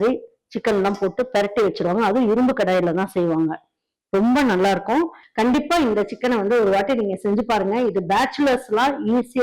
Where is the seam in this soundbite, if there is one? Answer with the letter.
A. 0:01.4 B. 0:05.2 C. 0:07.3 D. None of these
B